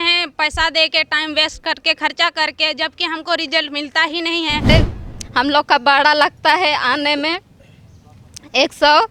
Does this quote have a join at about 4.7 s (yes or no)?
yes